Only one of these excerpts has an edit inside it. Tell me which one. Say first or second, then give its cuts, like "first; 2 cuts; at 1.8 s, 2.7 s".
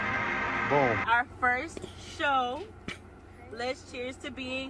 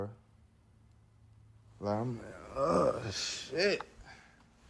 first; 1 cut; at 1.0 s